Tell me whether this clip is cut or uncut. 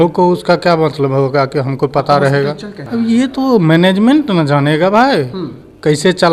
cut